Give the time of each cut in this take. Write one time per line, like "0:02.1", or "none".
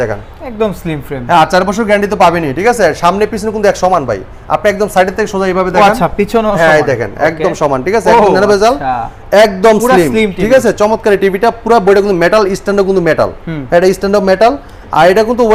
none